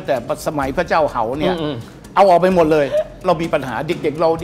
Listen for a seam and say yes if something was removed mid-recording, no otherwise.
yes